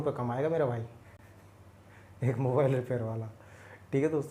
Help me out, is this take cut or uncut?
cut